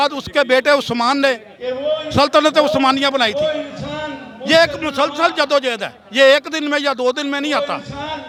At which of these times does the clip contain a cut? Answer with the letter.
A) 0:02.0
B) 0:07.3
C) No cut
C